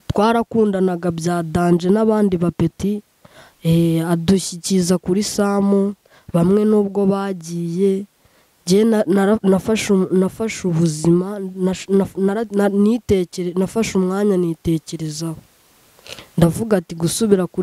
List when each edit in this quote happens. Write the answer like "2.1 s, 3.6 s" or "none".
none